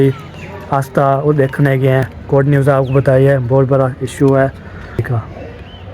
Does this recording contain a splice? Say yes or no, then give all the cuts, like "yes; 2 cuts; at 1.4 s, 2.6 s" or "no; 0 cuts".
yes; 2 cuts; at 2.1 s, 5.1 s